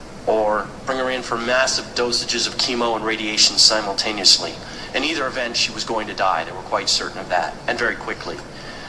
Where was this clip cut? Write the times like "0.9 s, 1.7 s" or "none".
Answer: 4.7 s